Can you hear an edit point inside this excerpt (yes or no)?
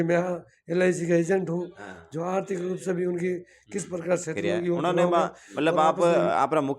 yes